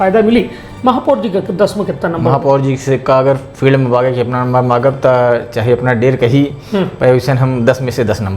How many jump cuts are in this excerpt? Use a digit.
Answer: 0